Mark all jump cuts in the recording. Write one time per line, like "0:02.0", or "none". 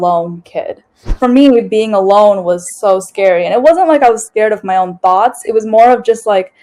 0:01.0